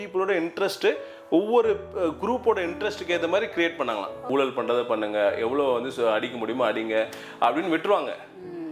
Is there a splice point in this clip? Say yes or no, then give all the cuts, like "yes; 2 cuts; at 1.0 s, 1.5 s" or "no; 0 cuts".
yes; 1 cut; at 4.2 s